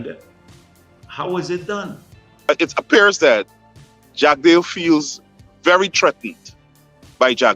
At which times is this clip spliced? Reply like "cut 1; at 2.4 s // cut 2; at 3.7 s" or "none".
cut 1; at 2.4 s